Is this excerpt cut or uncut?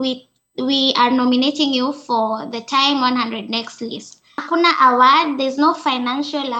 cut